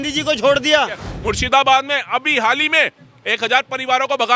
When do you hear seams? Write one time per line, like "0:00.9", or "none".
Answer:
0:01.1